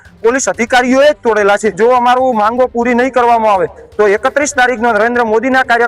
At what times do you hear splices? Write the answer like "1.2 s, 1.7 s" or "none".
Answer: 1.8 s